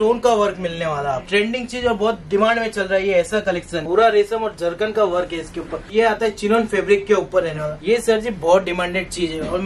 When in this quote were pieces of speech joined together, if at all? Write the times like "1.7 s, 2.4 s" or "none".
1.2 s, 3.8 s, 5.9 s, 7.7 s